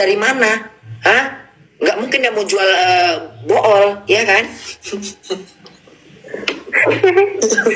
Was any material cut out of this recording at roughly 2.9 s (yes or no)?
no